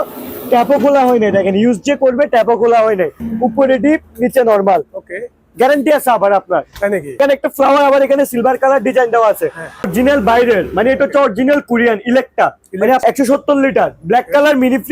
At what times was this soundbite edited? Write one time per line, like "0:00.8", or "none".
0:03.2
0:07.2
0:09.9
0:13.0